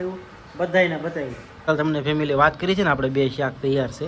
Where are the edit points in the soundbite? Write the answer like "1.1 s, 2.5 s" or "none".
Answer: 1.7 s